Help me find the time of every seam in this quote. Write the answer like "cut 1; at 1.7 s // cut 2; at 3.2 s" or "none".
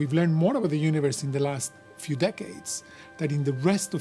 none